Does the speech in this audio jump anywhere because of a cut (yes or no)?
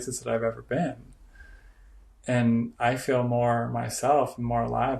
no